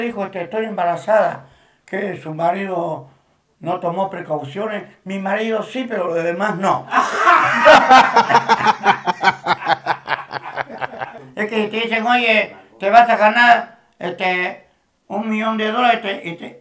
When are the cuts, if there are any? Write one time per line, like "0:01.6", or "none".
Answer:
0:11.2

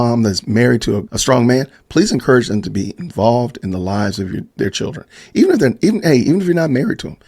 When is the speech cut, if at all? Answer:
0:01.1
0:04.4

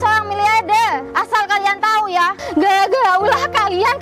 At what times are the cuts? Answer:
0:01.1
0:02.4

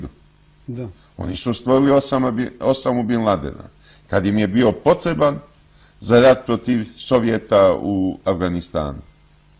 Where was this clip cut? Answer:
0:03.7

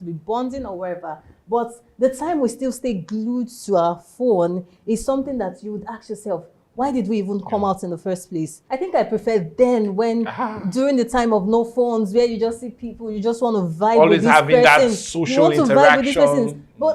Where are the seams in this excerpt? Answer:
0:08.6

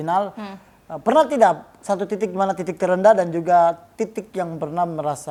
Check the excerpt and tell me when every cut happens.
none

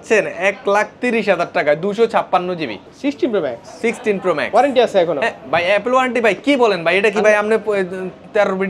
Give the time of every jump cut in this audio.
none

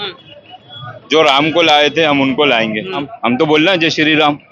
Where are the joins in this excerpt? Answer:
0:03.1

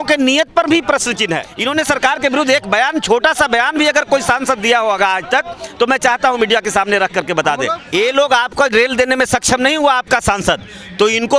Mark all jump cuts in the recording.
0:01.5
0:07.8

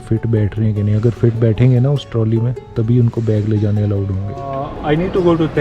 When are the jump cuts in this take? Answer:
0:04.7

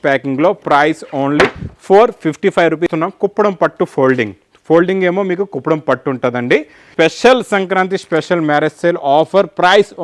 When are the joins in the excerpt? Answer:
0:02.9
0:06.9

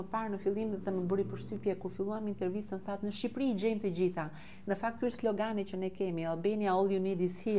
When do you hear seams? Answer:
none

